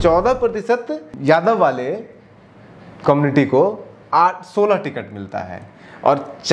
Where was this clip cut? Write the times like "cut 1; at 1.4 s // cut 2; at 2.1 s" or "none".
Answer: cut 1; at 1.0 s